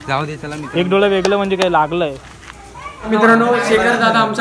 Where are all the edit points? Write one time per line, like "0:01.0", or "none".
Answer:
0:03.1